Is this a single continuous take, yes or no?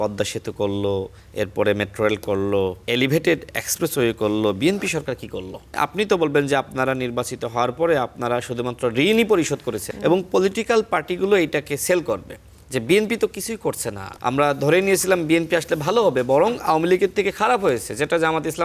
no